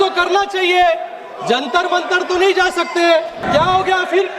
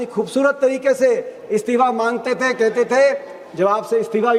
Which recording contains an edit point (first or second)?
first